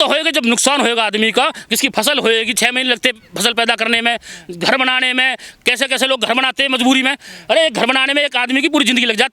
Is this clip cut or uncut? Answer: uncut